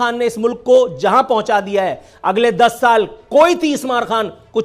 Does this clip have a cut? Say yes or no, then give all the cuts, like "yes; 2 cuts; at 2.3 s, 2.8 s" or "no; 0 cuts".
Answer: no; 0 cuts